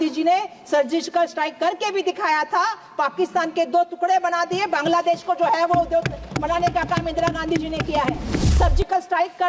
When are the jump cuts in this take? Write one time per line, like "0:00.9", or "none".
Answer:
0:08.4